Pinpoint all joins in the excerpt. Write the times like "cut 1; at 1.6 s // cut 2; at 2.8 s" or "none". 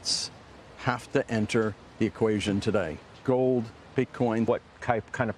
cut 1; at 4.5 s